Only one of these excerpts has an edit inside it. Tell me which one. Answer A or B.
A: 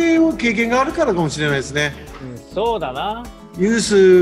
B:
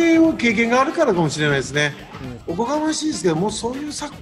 B